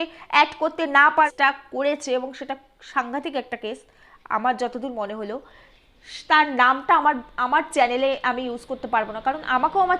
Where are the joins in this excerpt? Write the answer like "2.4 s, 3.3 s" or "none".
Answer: 1.3 s